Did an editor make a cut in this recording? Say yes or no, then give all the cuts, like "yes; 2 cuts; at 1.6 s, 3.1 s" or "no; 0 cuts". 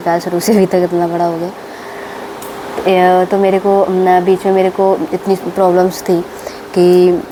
no; 0 cuts